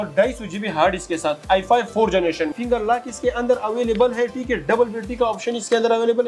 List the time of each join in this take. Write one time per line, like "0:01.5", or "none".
0:02.6

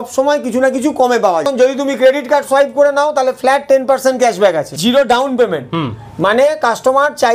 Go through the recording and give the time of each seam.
0:01.5
0:04.7

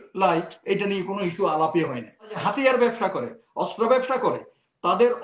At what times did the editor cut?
0:02.4

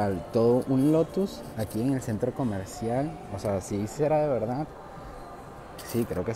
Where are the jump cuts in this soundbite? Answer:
none

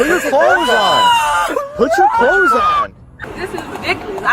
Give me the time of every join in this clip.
0:03.2

